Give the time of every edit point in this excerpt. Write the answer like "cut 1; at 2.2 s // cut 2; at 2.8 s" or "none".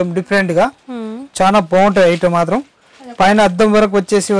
none